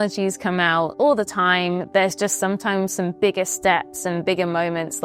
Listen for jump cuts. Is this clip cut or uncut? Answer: uncut